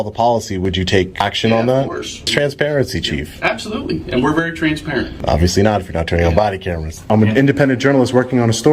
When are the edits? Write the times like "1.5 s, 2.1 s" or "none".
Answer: 1.1 s, 2.3 s, 5.2 s, 7.1 s

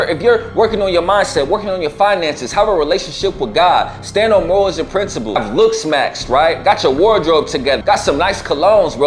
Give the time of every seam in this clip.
5.4 s, 7.8 s

